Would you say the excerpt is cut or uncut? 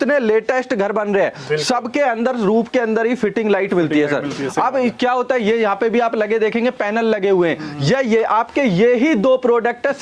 uncut